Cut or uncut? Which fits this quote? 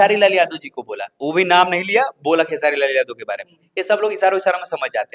uncut